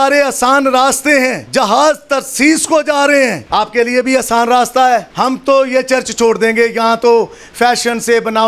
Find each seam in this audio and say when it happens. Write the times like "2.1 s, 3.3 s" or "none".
1.4 s, 3.4 s, 5.1 s